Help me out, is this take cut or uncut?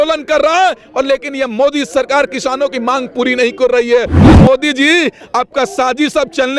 cut